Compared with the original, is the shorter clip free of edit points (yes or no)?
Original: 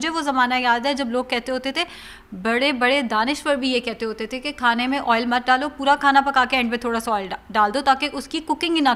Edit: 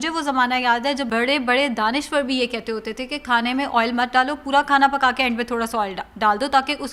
no